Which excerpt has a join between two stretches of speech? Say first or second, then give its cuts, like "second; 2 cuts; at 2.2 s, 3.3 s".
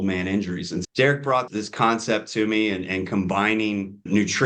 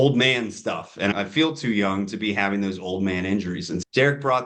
second; 1 cut; at 1.1 s